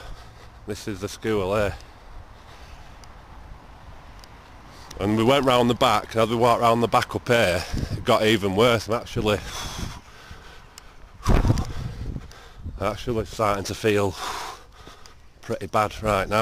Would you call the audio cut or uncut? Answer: cut